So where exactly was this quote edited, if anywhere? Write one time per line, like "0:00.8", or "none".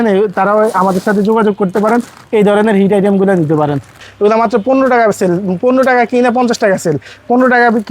0:04.0